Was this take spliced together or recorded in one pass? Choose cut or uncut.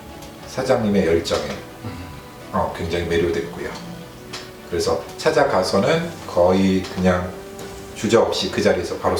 uncut